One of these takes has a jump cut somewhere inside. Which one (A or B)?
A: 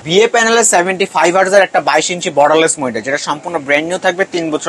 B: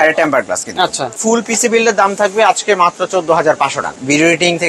B